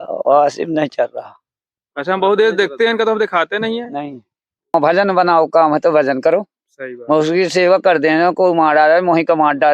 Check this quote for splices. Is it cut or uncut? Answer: cut